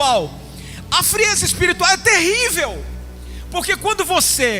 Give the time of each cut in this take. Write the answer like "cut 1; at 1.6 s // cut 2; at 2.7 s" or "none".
none

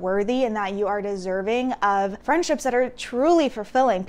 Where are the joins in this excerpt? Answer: cut 1; at 2.2 s

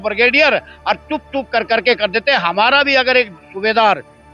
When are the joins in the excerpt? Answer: none

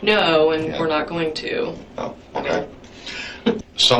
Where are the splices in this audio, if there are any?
none

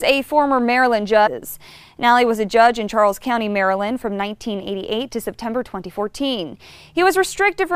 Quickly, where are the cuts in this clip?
none

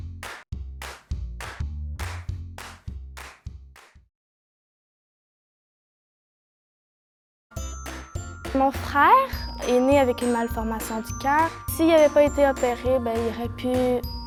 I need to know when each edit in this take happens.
none

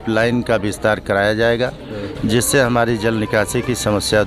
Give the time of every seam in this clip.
none

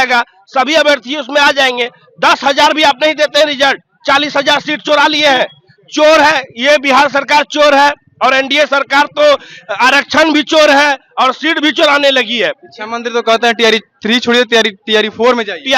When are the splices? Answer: none

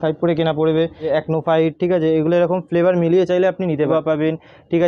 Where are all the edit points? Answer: cut 1; at 1.0 s // cut 2; at 3.9 s

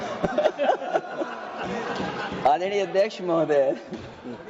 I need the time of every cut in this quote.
none

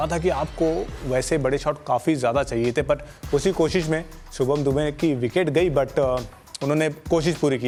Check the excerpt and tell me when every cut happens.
none

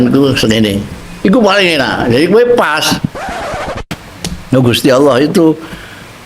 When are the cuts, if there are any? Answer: cut 1; at 3.7 s

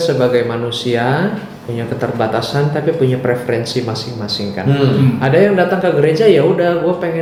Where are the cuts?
none

